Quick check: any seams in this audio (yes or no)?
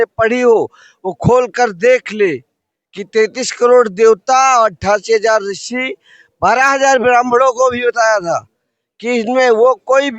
no